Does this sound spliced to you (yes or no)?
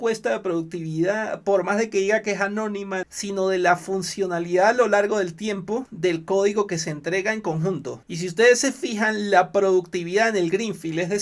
yes